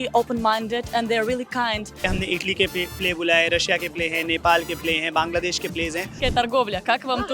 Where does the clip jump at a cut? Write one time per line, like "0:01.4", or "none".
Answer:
0:02.0
0:06.2

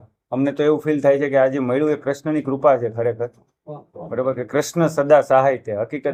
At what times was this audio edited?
none

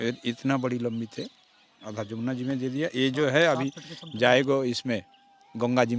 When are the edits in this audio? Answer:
none

